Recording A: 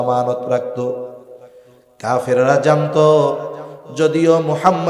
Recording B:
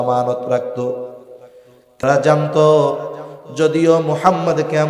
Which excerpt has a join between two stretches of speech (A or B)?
B